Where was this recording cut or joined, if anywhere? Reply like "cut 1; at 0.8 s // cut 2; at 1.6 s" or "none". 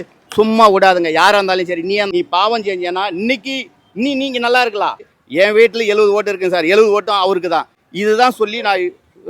cut 1; at 2.1 s // cut 2; at 5.2 s // cut 3; at 7.8 s